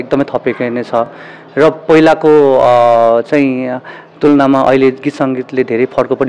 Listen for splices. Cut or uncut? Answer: uncut